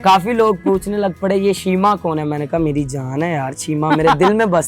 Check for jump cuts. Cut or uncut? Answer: uncut